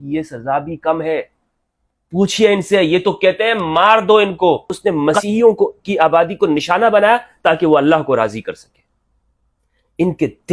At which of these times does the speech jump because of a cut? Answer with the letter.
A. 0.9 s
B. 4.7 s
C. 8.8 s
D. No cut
B